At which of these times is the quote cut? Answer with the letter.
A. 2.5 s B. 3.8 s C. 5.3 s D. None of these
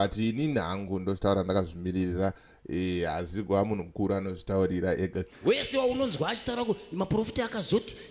C